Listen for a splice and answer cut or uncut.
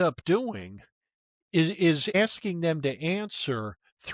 cut